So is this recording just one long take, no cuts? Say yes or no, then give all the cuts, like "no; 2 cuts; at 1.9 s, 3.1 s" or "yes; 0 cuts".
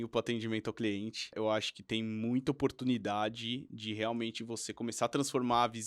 no; 1 cut; at 1.4 s